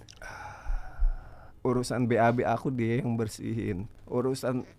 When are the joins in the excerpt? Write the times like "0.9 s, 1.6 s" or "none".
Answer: 1.5 s, 3.9 s

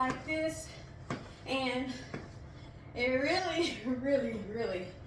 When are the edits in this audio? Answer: none

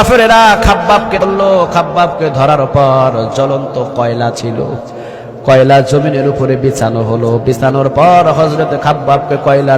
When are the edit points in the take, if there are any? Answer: 1.2 s

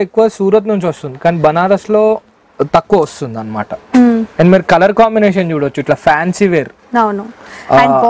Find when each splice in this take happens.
none

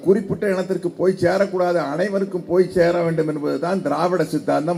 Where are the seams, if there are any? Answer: none

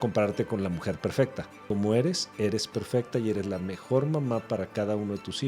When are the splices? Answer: 1.6 s

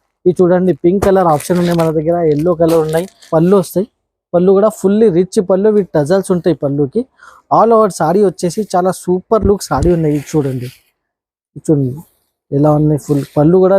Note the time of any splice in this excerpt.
3.2 s

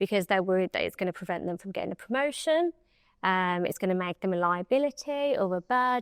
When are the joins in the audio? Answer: none

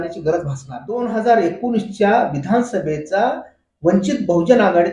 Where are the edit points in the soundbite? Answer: 1.0 s

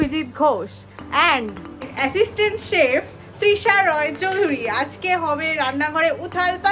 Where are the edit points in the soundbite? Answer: none

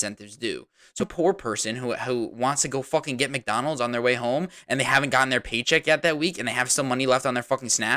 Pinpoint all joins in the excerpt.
1.1 s

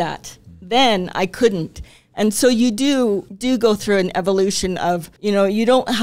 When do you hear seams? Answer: 3.3 s, 5.1 s

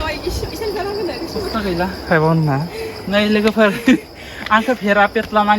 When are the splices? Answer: 1.5 s

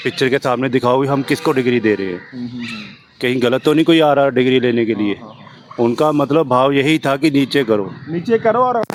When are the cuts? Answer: none

